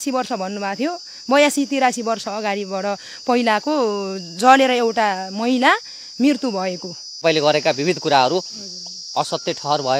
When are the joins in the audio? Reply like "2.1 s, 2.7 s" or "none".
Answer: 7.2 s